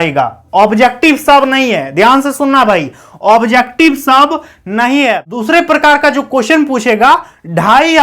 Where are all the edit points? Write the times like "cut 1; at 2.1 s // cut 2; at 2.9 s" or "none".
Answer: cut 1; at 5.2 s